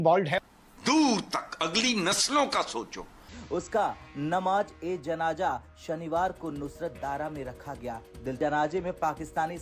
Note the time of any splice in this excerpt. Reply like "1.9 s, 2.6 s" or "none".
3.3 s, 8.3 s